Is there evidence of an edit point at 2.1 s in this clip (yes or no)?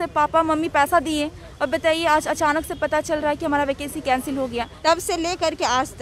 no